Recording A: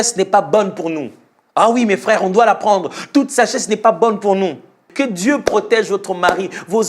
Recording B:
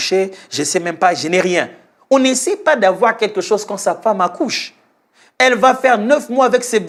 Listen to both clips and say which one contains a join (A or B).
A